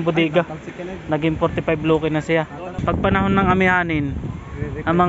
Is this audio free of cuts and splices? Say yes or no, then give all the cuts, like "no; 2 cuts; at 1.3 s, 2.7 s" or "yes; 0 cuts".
no; 1 cut; at 2.8 s